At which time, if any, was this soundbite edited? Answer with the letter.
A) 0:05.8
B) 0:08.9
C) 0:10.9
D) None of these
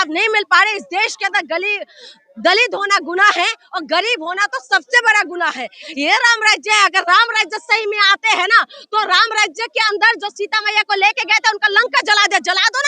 A